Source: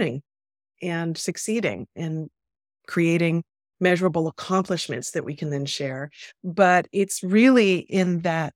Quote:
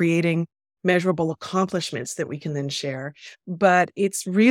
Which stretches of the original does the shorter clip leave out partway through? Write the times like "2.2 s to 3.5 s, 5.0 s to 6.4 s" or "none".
none